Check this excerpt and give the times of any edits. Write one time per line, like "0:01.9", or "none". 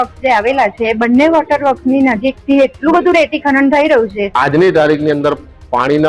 0:04.2